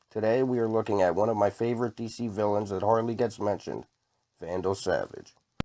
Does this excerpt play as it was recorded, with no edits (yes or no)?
no